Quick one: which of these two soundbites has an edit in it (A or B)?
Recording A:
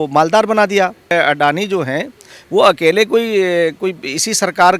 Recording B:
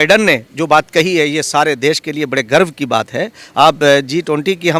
A